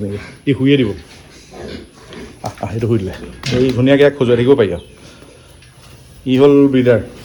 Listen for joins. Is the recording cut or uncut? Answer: uncut